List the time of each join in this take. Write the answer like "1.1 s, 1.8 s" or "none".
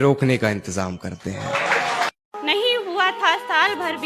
2.3 s